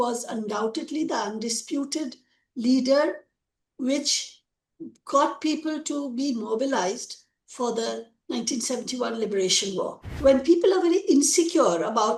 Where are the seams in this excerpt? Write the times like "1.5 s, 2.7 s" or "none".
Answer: 10.0 s